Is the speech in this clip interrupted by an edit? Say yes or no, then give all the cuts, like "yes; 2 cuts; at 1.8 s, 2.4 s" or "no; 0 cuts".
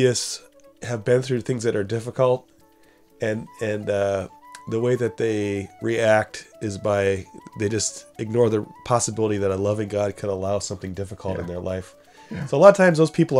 no; 0 cuts